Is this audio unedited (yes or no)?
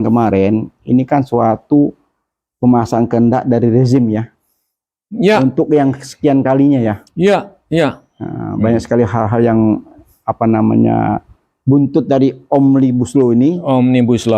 yes